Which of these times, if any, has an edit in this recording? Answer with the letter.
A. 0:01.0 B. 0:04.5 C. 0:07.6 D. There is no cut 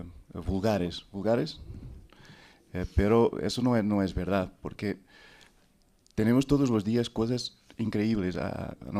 A